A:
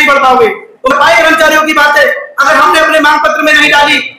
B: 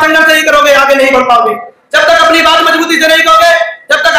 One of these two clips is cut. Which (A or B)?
A